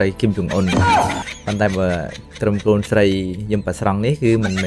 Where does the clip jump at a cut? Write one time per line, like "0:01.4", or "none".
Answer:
none